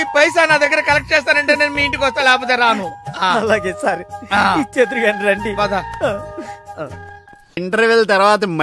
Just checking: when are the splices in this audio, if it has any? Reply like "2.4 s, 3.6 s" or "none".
7.6 s